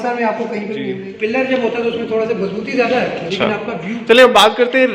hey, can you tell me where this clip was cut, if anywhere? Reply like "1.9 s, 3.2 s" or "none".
1.0 s, 3.3 s